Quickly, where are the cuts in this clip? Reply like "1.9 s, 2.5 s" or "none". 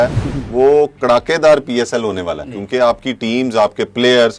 2.5 s